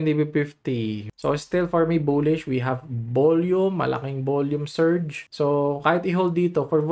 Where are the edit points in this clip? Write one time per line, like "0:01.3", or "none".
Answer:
0:01.0